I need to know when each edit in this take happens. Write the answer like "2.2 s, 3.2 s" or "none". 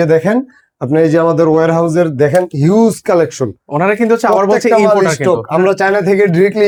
none